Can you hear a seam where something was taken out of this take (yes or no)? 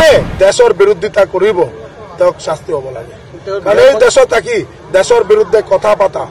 no